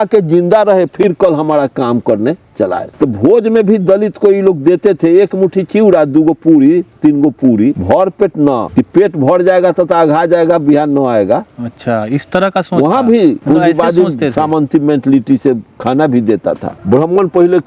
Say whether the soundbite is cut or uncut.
cut